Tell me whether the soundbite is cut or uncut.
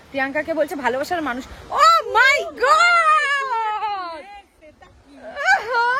uncut